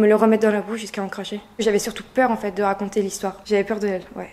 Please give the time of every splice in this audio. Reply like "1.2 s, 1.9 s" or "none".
1.5 s, 3.3 s